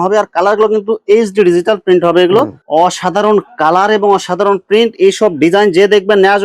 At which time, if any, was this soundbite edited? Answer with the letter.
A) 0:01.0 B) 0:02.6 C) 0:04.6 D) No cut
B